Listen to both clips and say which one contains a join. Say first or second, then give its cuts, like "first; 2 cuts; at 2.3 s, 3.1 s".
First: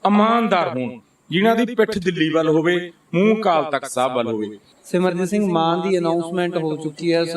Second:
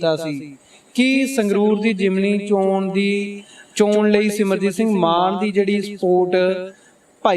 first; 1 cut; at 4.7 s